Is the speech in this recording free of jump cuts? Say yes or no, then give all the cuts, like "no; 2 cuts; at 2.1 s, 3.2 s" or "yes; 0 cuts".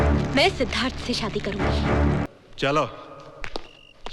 no; 1 cut; at 2.3 s